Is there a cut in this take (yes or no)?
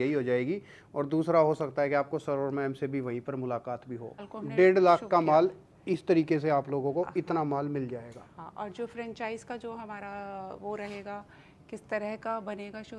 yes